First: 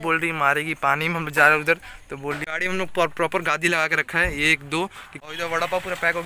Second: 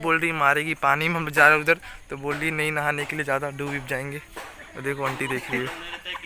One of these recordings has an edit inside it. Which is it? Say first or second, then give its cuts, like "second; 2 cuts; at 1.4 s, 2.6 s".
first; 2 cuts; at 2.4 s, 5.1 s